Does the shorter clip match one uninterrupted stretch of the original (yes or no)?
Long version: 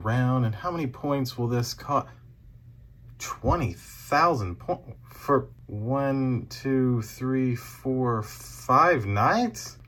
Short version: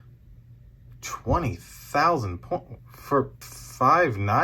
no